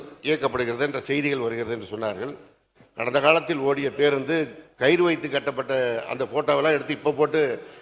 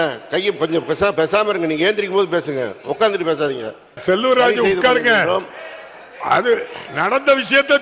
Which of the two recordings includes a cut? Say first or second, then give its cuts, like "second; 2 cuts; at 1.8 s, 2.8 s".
second; 1 cut; at 4.0 s